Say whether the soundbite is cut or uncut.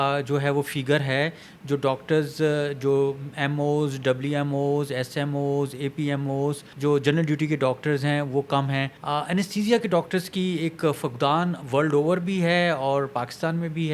cut